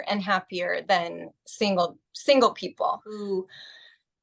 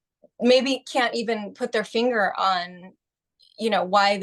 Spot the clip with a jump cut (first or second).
first